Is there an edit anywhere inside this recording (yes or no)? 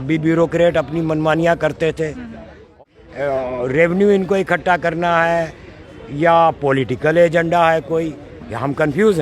yes